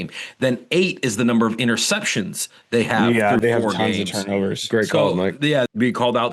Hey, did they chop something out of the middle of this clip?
no; 0 cuts

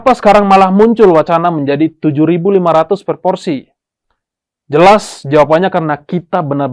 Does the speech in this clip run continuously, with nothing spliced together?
yes; 0 cuts

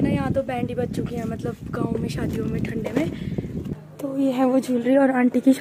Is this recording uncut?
yes; 0 cuts

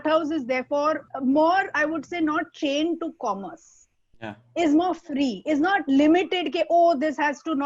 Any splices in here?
yes; 1 cut; at 1.1 s

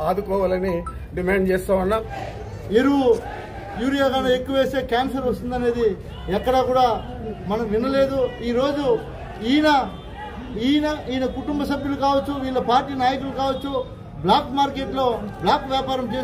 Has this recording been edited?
yes; 1 cut; at 2.2 s

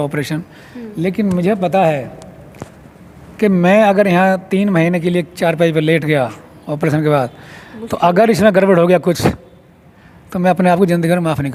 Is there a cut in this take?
no; 0 cuts

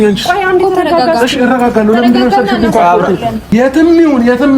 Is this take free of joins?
no; 1 cut; at 3.5 s

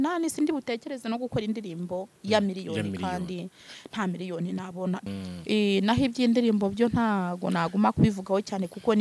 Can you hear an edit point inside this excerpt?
yes; 1 cut; at 5.1 s

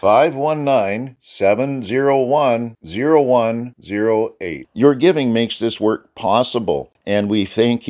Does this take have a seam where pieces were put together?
yes; 1 cut; at 6.9 s

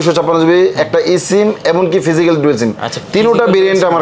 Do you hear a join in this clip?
no; 0 cuts

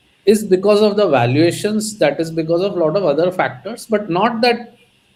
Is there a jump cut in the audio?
no; 0 cuts

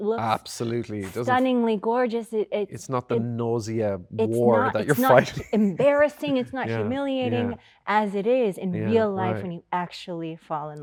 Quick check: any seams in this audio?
no; 0 cuts

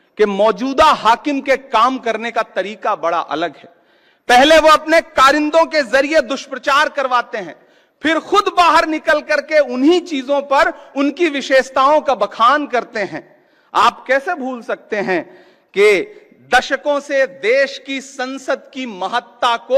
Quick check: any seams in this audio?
no; 0 cuts

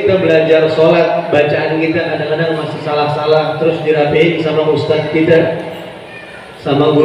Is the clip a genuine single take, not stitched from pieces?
yes; 0 cuts

